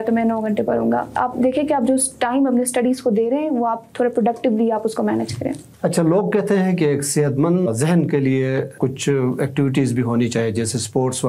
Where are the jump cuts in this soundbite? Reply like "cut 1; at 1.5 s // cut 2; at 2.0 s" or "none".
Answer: none